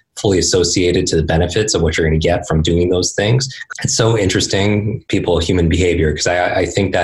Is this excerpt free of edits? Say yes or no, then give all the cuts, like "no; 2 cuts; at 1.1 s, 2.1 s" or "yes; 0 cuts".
no; 1 cut; at 3.5 s